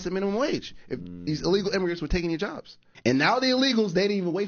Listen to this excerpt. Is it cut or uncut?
cut